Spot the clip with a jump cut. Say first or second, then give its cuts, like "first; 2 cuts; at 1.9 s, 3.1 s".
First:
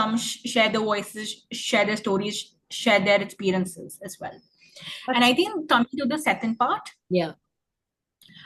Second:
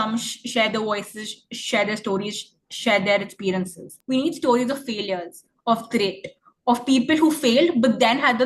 second; 1 cut; at 3.9 s